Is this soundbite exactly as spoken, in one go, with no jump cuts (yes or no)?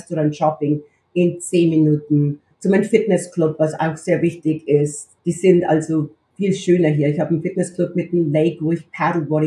no